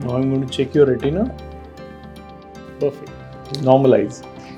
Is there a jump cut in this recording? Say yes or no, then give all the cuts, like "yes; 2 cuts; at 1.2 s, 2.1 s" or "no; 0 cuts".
no; 0 cuts